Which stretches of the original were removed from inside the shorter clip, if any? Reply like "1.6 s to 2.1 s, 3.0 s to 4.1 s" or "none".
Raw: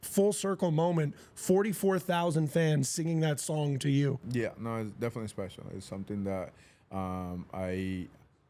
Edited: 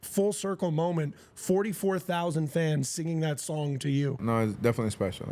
4.2 s to 4.6 s